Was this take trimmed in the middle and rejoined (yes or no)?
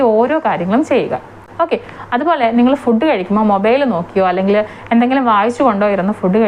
no